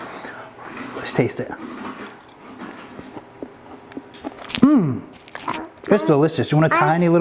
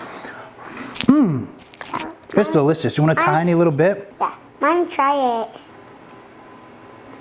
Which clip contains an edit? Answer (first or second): second